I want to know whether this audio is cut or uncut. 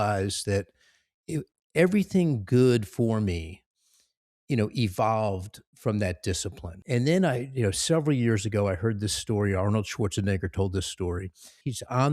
cut